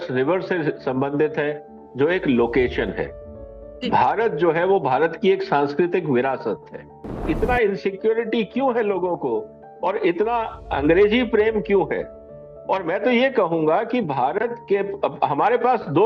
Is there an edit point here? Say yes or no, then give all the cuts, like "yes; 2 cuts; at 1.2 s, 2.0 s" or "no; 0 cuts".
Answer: yes; 1 cut; at 7.2 s